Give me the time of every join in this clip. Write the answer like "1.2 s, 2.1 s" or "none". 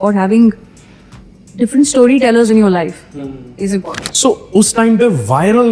4.0 s